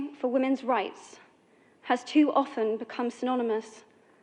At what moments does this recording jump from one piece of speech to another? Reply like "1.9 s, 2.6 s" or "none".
none